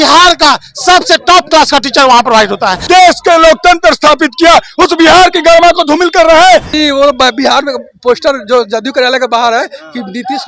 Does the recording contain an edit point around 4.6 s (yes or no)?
no